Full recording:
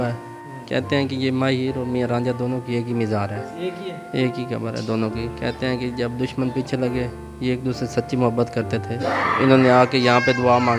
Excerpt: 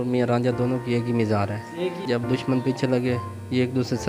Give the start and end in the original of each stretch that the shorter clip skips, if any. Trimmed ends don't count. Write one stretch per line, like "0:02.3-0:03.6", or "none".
0:03.8-0:05.9